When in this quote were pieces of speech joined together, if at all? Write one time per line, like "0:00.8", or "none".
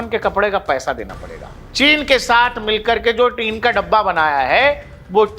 0:01.6